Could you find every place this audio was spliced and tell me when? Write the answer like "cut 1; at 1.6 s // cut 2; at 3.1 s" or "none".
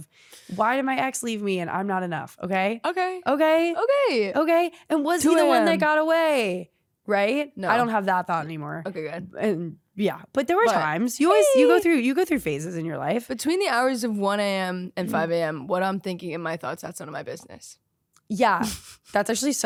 none